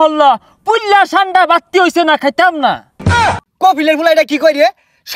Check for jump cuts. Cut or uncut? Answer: cut